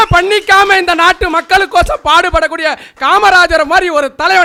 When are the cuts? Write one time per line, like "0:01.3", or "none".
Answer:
none